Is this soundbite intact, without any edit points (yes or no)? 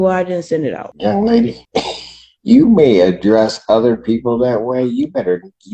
no